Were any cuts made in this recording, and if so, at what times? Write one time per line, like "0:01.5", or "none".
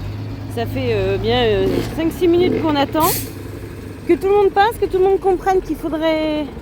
none